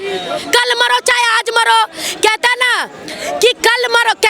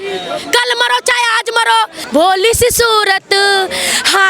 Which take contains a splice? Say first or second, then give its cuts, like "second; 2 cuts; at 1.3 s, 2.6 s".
second; 1 cut; at 2.0 s